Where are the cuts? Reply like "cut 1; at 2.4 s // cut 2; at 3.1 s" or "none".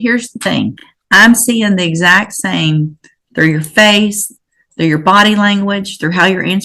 cut 1; at 0.9 s